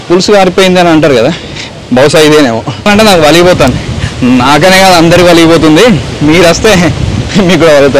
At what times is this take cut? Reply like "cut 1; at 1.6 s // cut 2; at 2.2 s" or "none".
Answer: cut 1; at 2.9 s